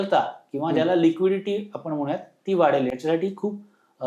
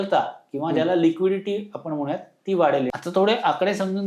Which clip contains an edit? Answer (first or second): second